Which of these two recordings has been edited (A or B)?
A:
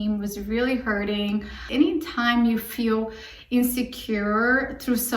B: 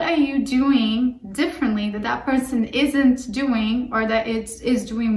A